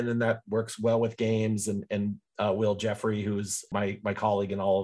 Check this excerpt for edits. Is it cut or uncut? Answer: cut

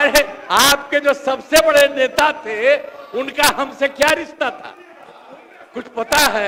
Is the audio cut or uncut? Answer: uncut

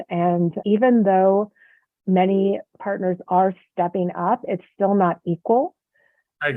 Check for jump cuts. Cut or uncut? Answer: cut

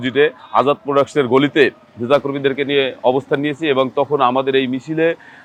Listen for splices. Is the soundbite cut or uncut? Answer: uncut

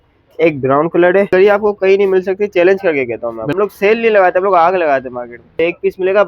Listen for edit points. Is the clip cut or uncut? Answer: cut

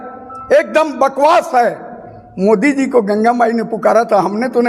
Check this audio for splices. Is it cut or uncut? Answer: uncut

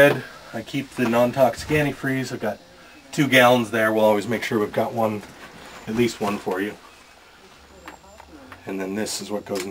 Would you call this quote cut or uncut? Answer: uncut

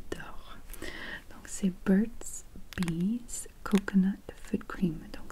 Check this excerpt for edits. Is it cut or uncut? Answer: uncut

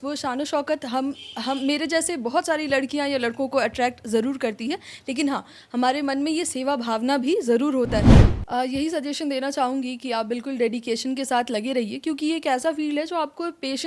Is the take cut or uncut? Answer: cut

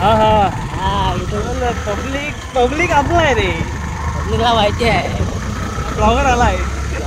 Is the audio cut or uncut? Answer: uncut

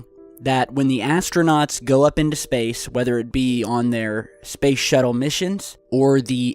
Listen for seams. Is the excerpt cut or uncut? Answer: cut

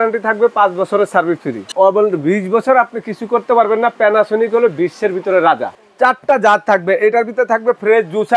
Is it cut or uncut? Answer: cut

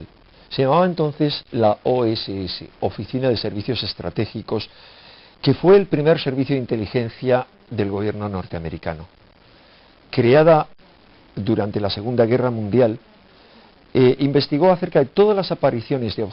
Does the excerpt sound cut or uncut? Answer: cut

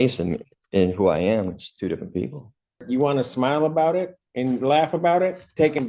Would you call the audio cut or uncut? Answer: cut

